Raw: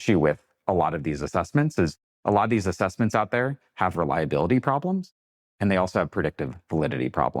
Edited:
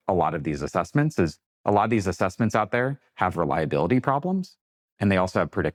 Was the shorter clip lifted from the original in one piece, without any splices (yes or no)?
yes